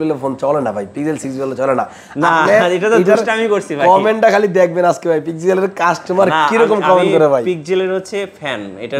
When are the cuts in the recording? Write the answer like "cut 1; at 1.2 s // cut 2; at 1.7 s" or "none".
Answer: none